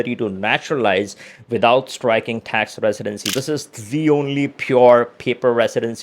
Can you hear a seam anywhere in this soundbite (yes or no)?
yes